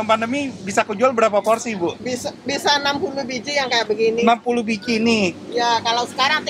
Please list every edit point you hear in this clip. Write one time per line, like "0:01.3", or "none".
none

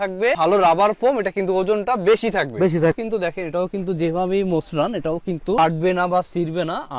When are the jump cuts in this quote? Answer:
0:03.0

